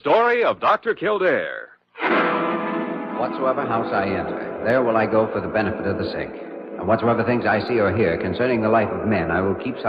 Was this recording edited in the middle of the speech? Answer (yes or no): no